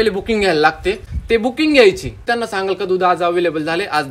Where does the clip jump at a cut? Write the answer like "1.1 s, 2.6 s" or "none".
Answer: 1.1 s, 2.2 s